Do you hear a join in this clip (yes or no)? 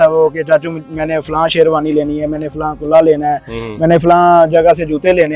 no